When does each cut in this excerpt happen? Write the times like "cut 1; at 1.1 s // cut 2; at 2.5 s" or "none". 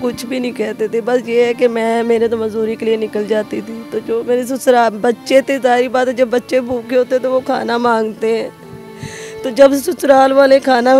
none